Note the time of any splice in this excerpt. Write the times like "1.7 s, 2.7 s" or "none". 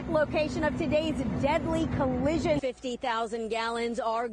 2.6 s